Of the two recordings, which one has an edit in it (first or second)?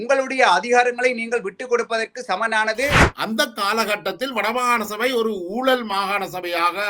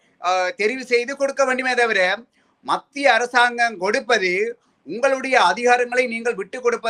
first